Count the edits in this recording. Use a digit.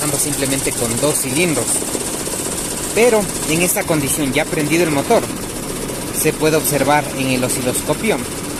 0